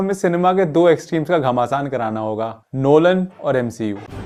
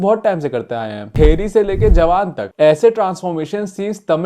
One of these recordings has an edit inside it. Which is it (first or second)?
second